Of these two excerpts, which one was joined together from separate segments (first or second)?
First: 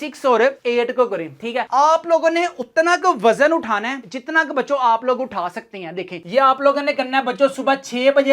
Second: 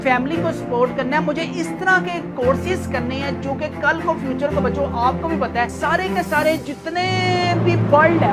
first